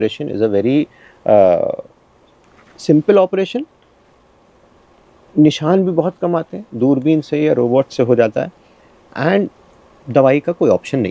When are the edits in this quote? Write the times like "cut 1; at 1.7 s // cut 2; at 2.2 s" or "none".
none